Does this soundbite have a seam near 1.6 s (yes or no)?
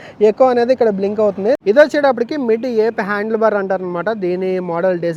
yes